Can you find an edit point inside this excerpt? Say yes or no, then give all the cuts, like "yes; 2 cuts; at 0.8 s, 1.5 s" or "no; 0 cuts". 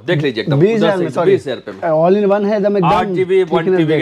no; 0 cuts